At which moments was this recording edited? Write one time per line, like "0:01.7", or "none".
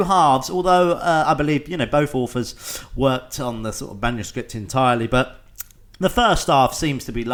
none